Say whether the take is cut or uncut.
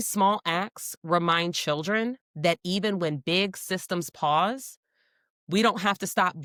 uncut